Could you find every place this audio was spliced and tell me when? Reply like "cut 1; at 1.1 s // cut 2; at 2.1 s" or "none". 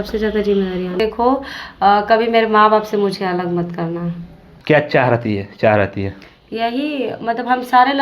cut 1; at 1.0 s // cut 2; at 4.5 s